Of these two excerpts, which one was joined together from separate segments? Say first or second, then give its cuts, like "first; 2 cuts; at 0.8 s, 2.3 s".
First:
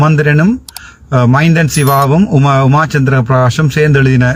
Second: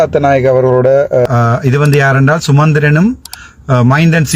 second; 1 cut; at 1.3 s